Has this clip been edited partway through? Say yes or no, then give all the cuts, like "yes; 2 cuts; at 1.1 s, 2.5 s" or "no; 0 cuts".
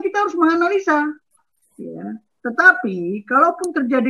yes; 1 cut; at 1.3 s